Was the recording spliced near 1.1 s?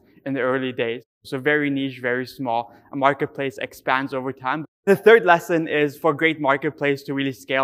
yes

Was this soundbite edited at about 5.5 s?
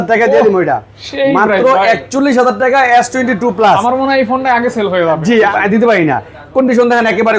yes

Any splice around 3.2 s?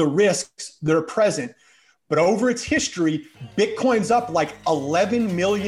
no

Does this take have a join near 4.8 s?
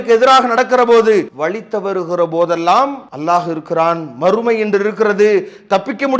no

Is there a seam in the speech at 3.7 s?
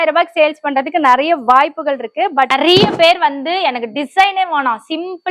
no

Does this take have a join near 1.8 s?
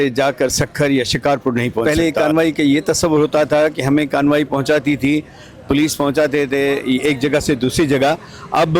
yes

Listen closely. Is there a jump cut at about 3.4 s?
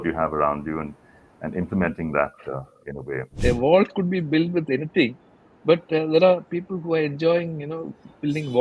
yes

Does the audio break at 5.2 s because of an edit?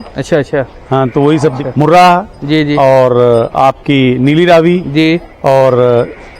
no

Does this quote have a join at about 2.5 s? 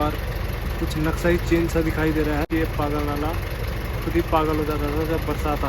yes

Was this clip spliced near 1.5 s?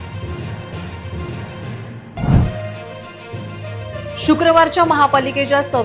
yes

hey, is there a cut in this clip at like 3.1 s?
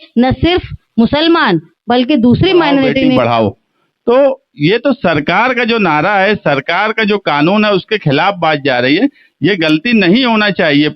yes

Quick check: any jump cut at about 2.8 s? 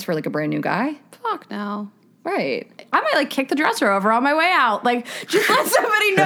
yes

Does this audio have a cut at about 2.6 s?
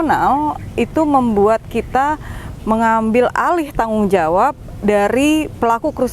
no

